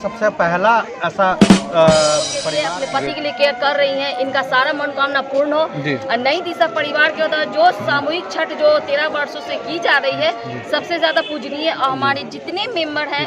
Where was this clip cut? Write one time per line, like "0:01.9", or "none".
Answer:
0:02.6